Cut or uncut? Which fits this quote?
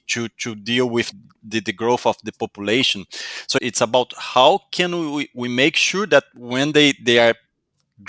cut